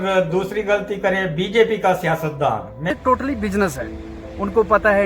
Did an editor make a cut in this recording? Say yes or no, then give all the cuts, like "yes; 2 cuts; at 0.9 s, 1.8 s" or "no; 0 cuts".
yes; 1 cut; at 2.8 s